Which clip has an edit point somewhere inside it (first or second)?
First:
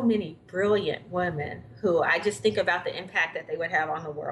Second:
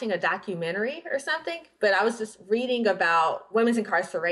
second